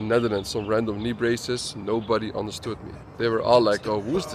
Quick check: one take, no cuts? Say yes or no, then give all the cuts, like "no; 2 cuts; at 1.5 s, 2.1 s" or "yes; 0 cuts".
yes; 0 cuts